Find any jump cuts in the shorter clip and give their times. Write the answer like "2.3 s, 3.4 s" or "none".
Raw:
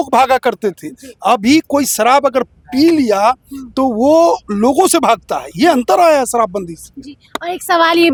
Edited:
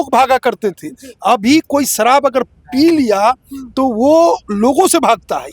none